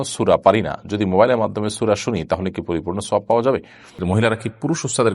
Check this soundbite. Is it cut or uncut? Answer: cut